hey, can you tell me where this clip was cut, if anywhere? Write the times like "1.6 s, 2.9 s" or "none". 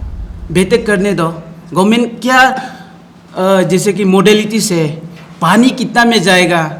none